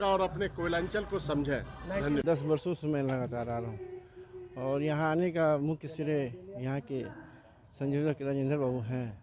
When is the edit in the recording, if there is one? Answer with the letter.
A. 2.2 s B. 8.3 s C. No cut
A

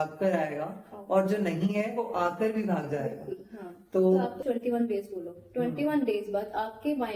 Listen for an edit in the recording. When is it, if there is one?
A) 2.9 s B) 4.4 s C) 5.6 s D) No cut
B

